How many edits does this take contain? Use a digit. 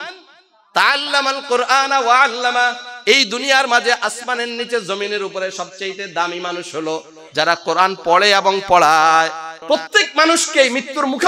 1